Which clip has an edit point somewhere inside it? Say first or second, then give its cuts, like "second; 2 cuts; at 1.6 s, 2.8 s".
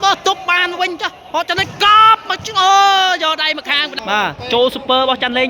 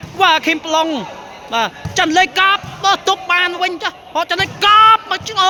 first; 1 cut; at 3.9 s